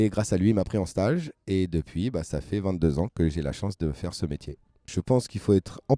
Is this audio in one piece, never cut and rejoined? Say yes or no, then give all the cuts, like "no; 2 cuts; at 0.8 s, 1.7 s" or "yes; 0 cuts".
no; 1 cut; at 4.9 s